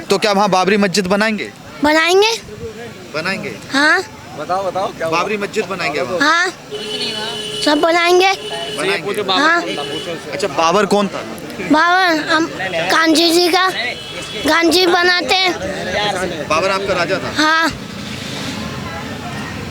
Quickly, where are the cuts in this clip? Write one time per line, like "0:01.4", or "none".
none